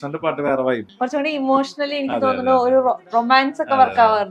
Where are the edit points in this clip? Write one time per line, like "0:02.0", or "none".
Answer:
0:00.9
0:03.0